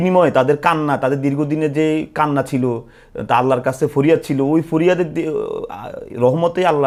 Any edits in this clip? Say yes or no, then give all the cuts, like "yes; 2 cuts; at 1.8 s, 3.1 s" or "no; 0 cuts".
no; 0 cuts